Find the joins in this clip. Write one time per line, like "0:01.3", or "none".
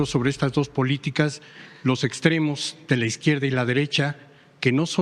none